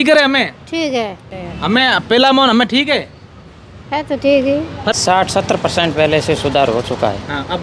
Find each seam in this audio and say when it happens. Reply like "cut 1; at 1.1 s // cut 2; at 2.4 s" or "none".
cut 1; at 1.2 s // cut 2; at 4.9 s